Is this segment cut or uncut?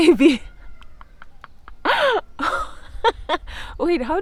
uncut